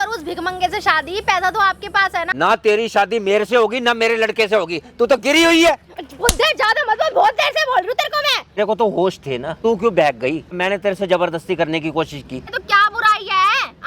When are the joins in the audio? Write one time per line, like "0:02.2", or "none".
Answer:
0:02.3
0:08.6
0:09.6
0:10.6
0:12.6